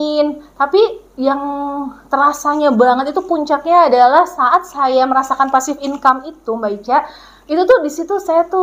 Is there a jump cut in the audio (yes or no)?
no